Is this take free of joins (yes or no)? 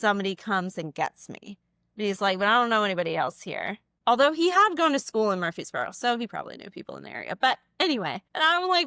yes